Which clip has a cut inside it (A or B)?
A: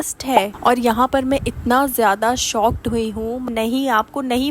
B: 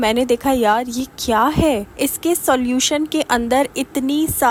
A